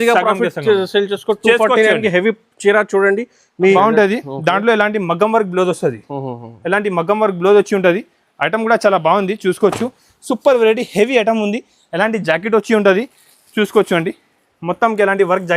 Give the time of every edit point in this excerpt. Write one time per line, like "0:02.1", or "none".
0:03.8